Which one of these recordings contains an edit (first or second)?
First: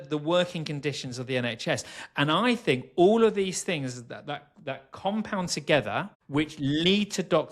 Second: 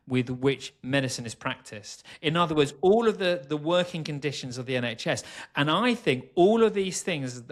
first